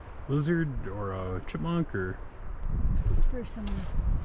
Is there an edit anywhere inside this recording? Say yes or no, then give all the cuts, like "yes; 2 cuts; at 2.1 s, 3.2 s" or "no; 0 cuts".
yes; 1 cut; at 2.5 s